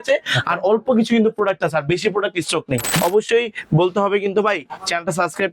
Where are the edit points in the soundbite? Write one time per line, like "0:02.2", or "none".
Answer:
0:02.9